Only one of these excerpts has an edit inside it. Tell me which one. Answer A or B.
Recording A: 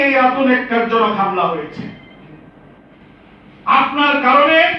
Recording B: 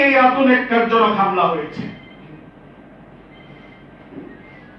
A